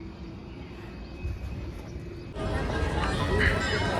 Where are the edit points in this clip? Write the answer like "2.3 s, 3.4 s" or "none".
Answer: 2.4 s